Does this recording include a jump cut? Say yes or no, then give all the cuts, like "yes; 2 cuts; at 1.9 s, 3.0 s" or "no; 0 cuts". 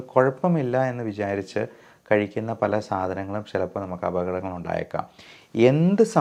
no; 0 cuts